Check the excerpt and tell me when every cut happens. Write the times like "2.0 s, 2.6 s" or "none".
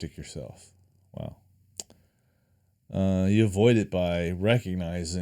1.6 s

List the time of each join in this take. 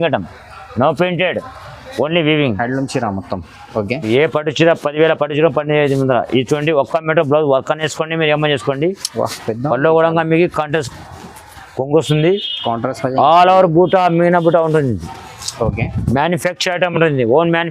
4.1 s

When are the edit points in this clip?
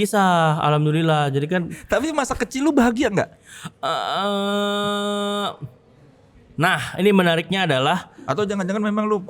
1.8 s, 8.1 s

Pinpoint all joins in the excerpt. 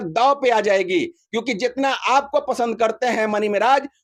none

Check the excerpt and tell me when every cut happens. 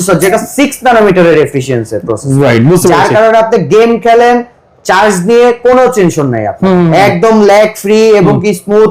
none

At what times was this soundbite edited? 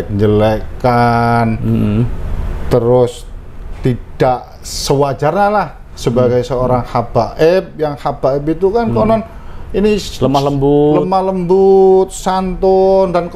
none

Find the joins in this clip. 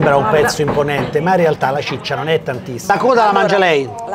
2.9 s

